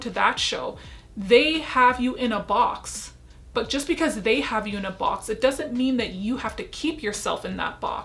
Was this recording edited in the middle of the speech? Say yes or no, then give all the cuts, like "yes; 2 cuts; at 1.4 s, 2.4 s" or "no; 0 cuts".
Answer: no; 0 cuts